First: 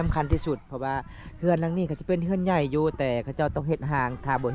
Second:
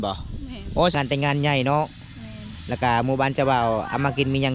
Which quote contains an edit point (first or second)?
second